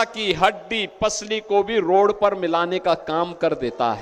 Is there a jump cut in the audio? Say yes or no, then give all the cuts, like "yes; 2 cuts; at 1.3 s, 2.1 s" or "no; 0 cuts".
no; 0 cuts